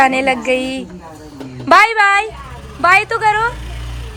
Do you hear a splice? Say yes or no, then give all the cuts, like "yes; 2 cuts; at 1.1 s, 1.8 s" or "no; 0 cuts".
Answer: no; 0 cuts